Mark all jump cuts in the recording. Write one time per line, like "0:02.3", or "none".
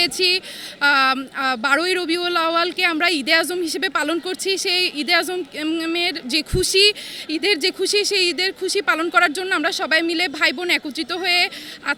none